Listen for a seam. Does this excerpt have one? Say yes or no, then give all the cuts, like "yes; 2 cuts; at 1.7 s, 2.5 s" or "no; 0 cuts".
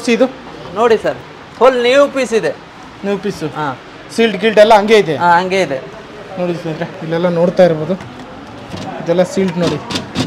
no; 0 cuts